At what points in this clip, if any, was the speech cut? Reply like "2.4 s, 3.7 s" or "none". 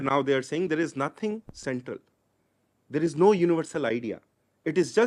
none